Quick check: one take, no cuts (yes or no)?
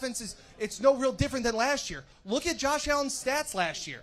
yes